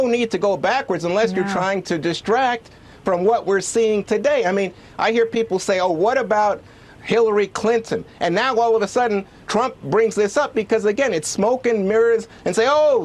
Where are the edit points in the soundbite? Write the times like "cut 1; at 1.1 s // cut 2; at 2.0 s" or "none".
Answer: cut 1; at 8.1 s